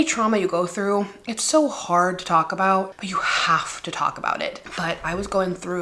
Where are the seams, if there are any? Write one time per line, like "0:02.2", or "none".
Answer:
0:03.0
0:04.6